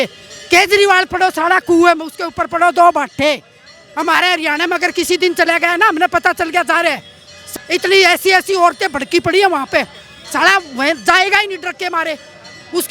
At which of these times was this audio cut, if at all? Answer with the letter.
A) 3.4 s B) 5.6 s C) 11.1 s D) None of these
D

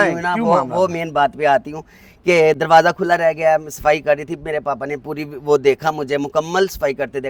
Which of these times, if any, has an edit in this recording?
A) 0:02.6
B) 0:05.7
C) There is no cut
C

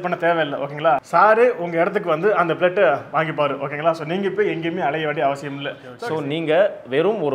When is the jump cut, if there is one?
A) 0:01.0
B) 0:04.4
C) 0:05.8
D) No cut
C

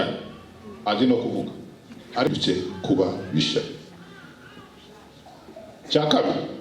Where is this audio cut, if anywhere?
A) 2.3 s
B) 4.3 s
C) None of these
A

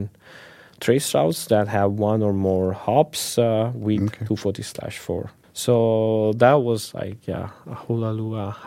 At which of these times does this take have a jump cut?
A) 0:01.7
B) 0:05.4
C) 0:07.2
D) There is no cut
B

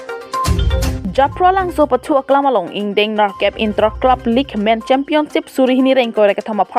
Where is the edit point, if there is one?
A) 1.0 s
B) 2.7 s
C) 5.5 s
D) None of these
A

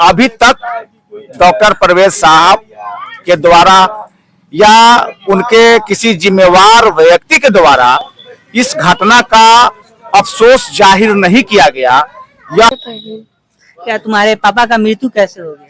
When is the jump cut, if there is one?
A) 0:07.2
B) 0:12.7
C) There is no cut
B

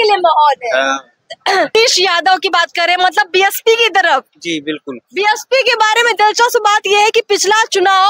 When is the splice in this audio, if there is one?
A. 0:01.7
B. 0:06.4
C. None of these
A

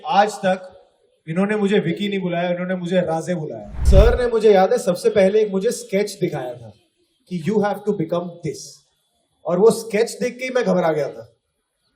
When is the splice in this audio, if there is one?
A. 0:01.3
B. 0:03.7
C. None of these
B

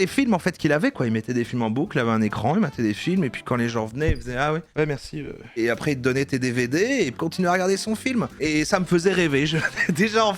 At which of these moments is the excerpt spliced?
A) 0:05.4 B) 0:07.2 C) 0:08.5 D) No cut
B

